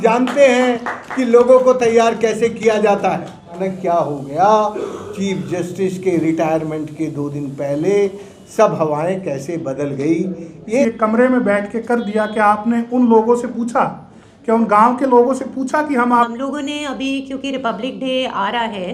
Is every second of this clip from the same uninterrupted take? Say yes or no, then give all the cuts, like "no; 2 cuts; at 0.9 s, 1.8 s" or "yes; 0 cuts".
no; 3 cuts; at 3.6 s, 10.8 s, 16.1 s